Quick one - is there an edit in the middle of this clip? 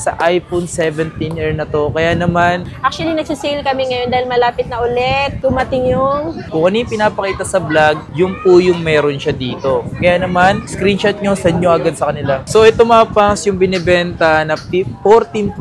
yes; 3 cuts; at 2.6 s, 6.5 s, 12.4 s

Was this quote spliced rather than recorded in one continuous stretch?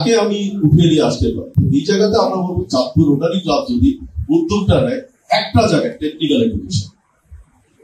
no; 0 cuts

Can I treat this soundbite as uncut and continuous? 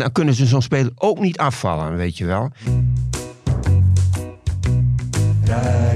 no; 1 cut; at 2.5 s

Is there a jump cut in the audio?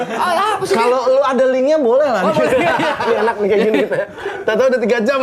yes; 1 cut; at 3.0 s

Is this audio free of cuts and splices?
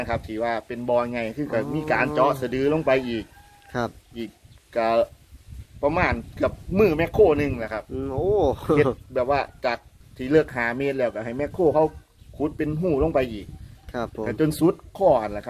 yes; 0 cuts

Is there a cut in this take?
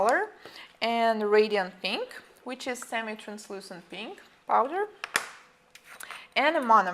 yes; 1 cut; at 3.9 s

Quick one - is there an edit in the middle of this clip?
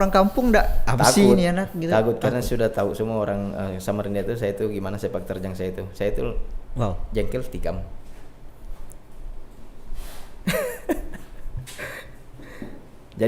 no; 0 cuts

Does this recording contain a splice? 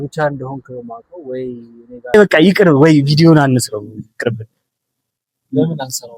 yes; 1 cut; at 2.1 s

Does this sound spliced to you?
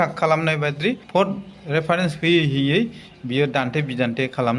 yes; 1 cut; at 1.0 s

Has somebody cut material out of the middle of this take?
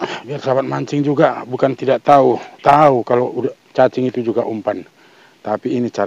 no; 0 cuts

